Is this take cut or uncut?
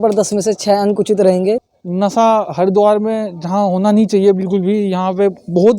cut